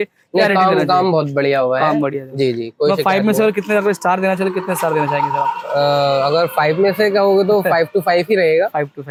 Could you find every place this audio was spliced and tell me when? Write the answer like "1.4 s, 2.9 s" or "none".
none